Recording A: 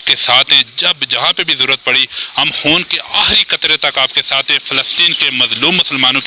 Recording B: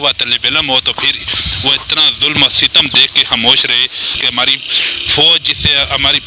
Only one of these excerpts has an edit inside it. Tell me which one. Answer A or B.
B